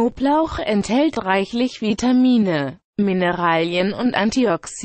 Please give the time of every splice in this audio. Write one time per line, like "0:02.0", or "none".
0:01.1
0:02.8